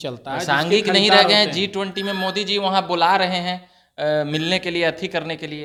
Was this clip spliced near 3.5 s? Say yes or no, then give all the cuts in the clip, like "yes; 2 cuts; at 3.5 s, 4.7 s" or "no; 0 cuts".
no; 0 cuts